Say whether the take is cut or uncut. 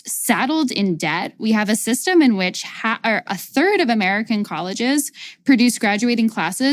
uncut